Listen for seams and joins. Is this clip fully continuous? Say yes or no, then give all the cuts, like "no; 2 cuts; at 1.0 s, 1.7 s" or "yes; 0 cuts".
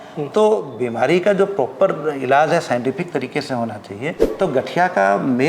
no; 1 cut; at 4.2 s